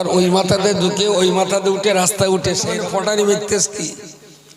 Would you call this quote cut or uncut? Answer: cut